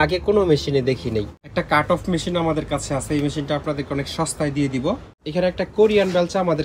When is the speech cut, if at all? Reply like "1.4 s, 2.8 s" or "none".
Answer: 1.4 s, 5.1 s